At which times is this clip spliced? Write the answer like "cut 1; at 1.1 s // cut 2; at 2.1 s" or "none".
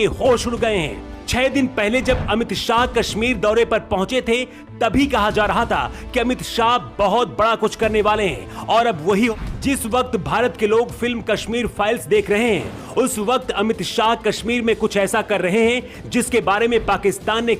cut 1; at 9.3 s